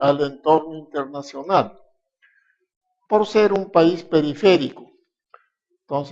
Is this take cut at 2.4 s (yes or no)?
no